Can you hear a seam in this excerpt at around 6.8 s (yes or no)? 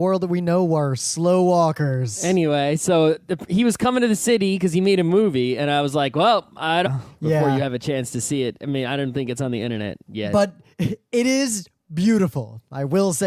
no